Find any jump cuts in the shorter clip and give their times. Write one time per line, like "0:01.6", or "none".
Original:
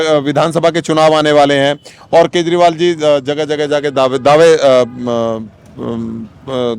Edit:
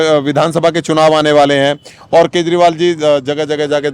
none